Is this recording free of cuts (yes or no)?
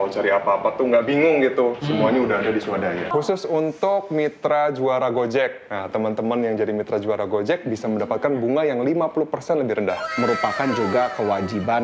no